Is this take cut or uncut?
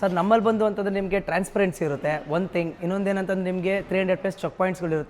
uncut